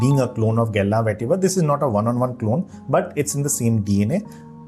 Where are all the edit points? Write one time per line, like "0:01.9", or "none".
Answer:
none